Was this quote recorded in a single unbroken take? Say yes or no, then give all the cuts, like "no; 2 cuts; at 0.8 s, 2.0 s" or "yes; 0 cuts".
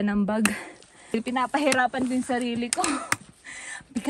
no; 1 cut; at 1.1 s